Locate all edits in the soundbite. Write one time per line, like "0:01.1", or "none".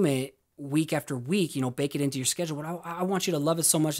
none